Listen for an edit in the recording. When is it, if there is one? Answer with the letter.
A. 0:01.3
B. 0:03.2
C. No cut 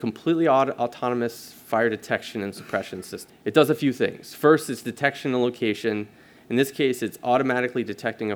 B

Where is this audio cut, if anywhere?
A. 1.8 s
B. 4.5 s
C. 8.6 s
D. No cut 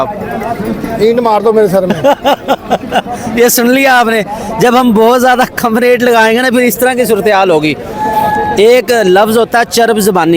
D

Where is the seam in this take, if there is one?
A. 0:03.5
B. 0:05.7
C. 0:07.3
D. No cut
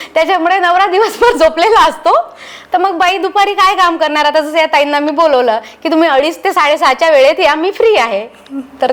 D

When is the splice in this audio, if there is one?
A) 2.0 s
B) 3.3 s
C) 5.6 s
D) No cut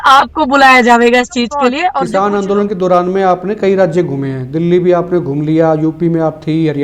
A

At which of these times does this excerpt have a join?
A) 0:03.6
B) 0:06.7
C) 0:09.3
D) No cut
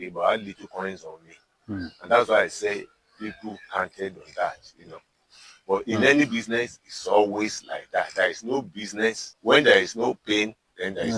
C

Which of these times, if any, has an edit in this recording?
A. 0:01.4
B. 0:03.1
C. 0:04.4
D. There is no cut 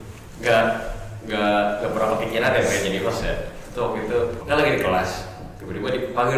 C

